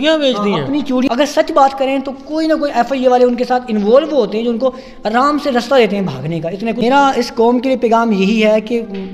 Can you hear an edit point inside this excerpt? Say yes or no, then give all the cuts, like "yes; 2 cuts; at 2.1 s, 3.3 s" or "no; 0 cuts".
yes; 2 cuts; at 1.0 s, 6.8 s